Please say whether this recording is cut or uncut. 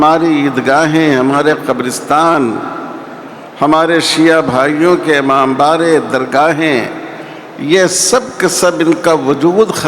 uncut